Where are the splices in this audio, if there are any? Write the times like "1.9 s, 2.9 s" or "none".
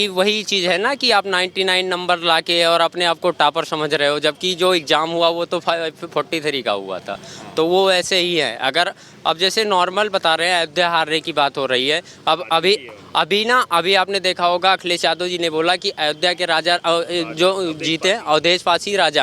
none